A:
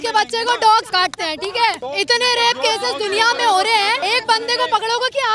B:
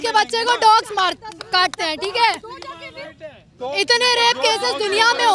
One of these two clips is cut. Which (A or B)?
A